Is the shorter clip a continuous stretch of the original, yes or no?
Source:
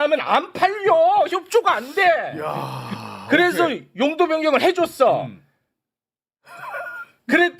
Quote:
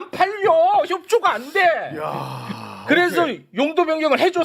yes